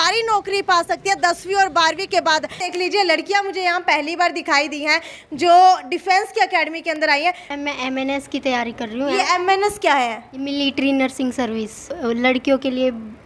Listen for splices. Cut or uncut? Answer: cut